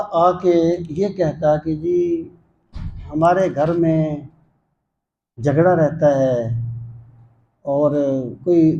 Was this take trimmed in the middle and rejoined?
no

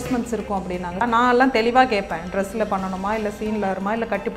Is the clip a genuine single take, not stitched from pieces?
no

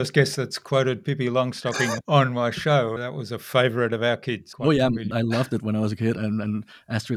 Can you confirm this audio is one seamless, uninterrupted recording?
no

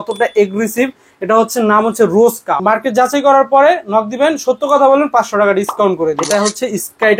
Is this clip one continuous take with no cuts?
no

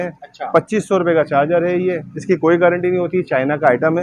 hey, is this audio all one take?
yes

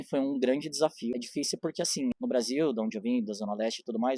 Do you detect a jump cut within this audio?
yes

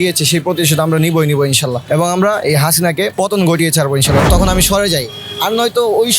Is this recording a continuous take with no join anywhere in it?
no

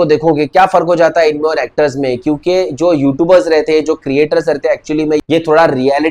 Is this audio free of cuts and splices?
yes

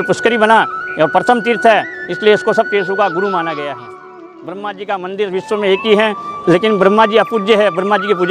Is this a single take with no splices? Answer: no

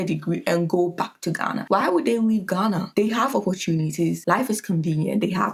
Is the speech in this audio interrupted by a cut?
no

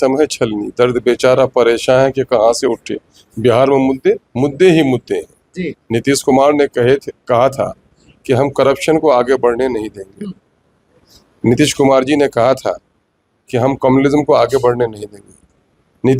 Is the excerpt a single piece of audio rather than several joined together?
yes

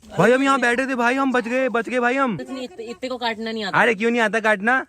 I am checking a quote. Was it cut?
yes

